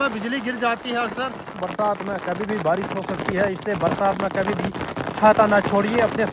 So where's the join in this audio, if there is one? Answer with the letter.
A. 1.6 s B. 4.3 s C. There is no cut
A